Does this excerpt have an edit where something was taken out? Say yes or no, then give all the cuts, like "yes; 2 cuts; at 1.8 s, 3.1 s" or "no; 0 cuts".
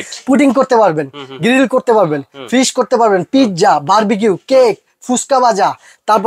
no; 0 cuts